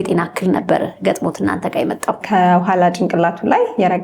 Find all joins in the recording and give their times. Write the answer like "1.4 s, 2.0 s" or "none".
2.2 s